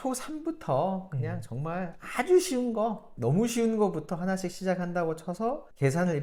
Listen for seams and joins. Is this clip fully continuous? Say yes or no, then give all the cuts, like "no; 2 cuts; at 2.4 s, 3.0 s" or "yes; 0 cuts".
yes; 0 cuts